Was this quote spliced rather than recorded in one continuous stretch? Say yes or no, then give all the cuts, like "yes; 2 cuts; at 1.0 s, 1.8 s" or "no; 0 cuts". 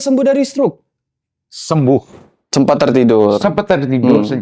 yes; 1 cut; at 2.1 s